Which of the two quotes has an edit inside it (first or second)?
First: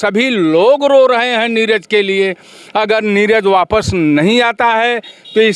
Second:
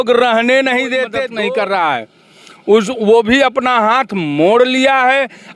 second